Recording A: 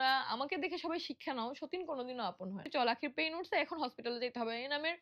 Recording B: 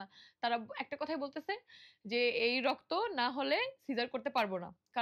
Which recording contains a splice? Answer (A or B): A